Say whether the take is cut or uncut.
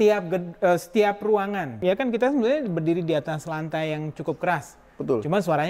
cut